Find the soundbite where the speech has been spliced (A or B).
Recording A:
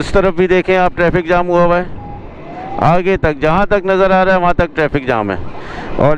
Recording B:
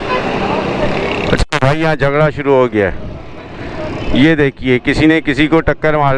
B